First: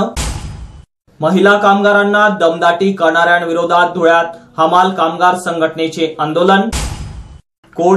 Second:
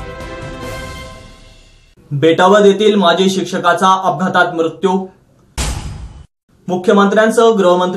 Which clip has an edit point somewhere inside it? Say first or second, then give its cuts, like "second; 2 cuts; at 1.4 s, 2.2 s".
second; 1 cut; at 1.6 s